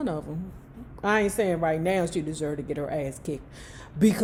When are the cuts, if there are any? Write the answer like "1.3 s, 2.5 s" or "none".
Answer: none